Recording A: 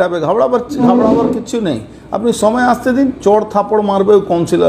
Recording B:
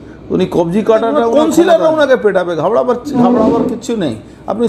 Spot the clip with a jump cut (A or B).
B